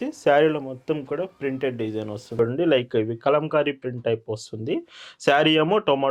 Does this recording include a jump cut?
yes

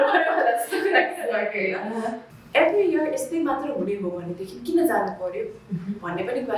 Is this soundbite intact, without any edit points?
no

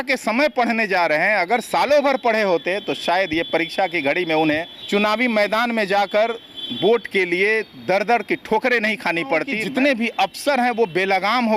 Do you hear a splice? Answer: yes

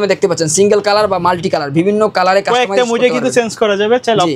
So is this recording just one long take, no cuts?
yes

